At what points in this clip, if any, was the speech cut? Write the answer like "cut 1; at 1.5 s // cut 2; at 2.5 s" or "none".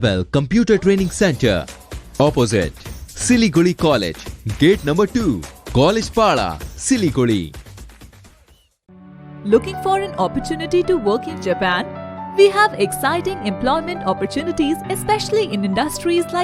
none